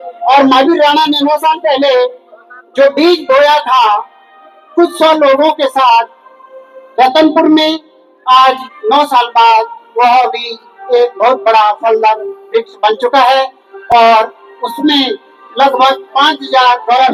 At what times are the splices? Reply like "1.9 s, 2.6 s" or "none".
none